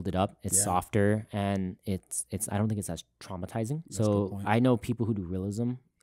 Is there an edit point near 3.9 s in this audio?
yes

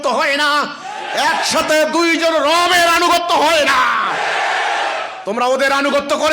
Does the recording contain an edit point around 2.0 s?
no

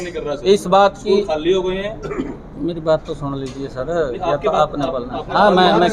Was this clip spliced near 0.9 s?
no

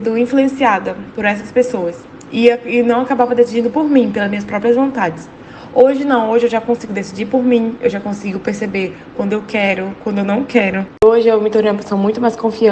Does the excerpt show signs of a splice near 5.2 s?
no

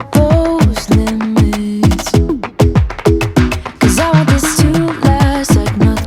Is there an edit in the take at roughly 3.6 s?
yes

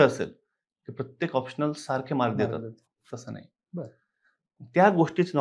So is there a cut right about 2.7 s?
no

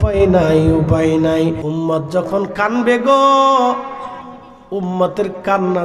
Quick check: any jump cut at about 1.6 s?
yes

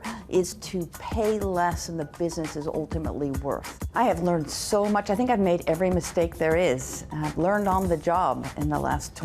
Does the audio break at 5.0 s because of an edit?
no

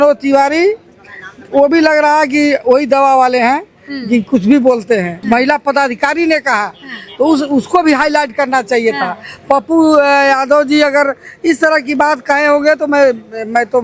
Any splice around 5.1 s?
yes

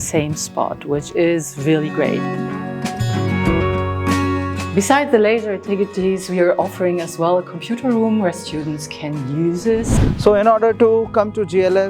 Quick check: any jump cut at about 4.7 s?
yes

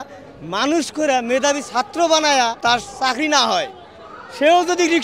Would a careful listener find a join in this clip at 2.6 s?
yes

